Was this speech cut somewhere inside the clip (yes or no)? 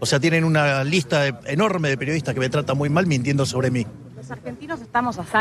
no